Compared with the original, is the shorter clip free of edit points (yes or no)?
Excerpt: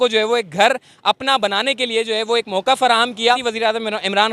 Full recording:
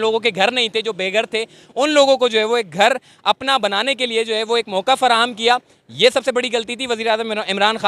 no